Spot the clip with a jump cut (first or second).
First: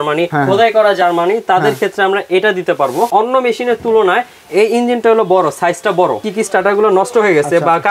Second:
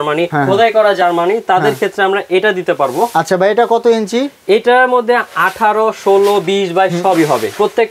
first